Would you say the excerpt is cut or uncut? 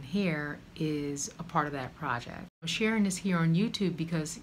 cut